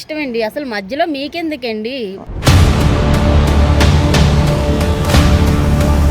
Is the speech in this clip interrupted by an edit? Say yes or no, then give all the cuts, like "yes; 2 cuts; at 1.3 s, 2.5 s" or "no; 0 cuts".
yes; 1 cut; at 2.1 s